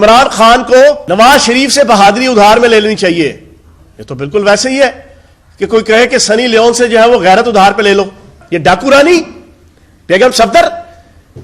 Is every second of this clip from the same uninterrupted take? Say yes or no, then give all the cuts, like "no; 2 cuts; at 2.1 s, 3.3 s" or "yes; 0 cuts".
no; 2 cuts; at 1.0 s, 8.3 s